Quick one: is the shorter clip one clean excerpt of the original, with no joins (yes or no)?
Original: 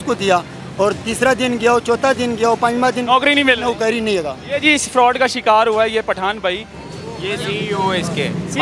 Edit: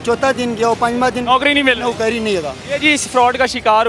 yes